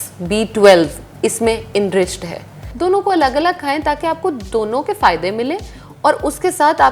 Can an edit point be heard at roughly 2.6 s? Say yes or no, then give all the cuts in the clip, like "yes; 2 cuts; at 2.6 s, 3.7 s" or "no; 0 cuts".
yes; 1 cut; at 2.6 s